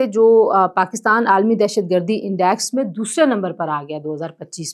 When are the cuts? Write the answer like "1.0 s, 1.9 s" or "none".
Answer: none